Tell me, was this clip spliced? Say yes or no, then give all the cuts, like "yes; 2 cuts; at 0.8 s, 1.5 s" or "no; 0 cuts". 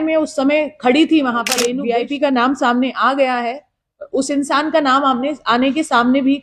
yes; 1 cut; at 1.7 s